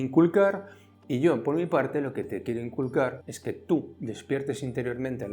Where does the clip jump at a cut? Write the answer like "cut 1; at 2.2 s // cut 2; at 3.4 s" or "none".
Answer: cut 1; at 3.3 s